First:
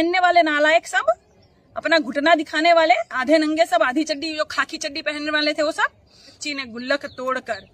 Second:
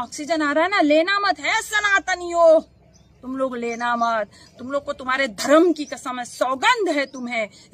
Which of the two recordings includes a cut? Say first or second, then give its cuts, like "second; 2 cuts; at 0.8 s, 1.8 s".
first; 1 cut; at 6.3 s